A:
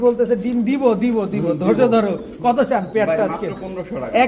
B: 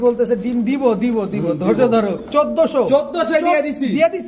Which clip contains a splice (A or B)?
B